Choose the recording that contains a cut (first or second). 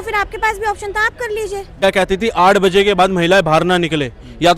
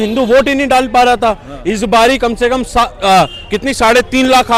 first